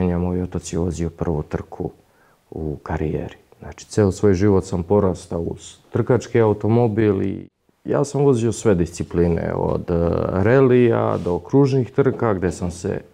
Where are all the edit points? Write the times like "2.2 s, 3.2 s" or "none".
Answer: 7.5 s